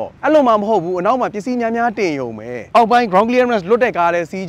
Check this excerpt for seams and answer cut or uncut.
cut